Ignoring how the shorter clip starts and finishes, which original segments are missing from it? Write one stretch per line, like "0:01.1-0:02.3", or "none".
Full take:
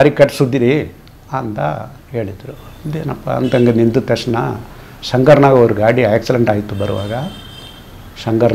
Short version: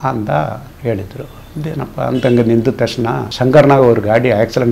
0:04.5-0:05.0